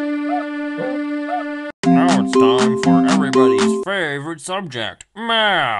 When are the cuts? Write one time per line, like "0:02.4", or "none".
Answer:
0:01.7

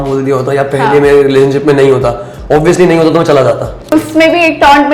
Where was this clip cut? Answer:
0:03.9

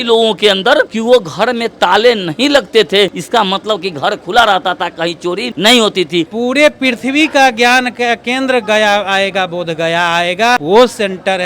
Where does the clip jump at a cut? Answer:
0:00.9
0:03.2
0:05.5
0:06.3
0:10.6

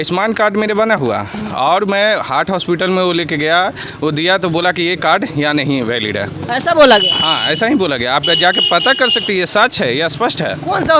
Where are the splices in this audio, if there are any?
none

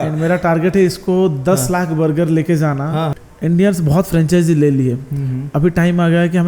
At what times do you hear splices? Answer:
0:03.2

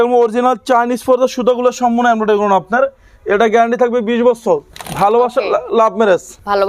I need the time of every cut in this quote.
none

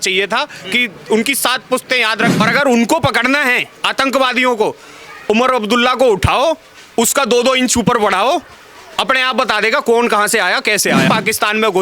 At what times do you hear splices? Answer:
0:02.4
0:11.1

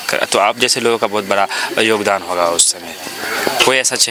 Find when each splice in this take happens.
none

